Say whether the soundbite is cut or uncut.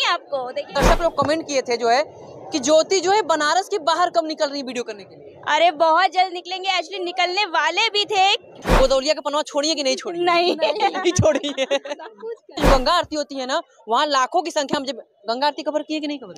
cut